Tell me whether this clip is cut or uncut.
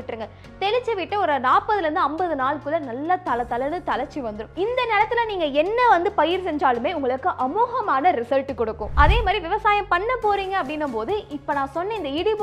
cut